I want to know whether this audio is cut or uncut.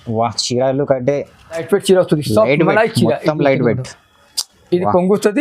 cut